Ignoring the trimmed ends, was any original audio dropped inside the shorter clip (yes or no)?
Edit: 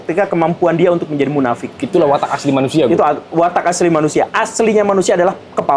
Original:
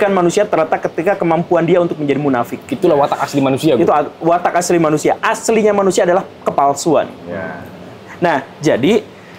no